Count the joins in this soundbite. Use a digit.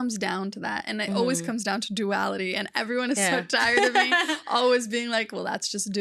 0